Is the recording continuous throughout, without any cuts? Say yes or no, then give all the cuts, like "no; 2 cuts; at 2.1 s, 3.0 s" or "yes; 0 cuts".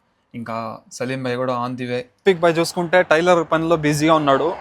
no; 1 cut; at 2.1 s